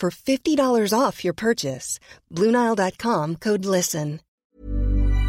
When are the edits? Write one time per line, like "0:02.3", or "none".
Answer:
0:04.3